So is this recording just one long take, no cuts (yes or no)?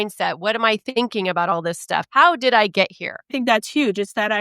no